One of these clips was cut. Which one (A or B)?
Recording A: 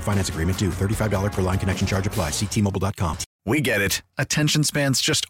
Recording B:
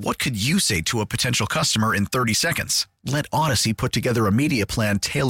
A